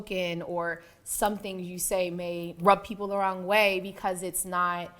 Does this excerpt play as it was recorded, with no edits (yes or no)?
no